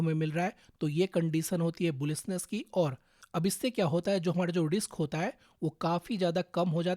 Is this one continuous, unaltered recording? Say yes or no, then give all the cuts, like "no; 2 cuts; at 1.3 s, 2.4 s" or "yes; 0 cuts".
no; 1 cut; at 3.1 s